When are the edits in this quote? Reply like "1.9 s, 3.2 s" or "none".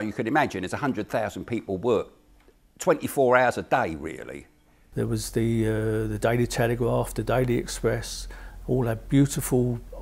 4.9 s